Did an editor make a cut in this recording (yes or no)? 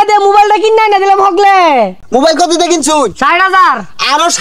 yes